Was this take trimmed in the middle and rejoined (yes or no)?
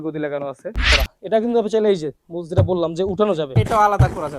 yes